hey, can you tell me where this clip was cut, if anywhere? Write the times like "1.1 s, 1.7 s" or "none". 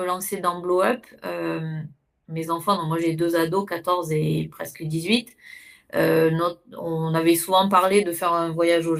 none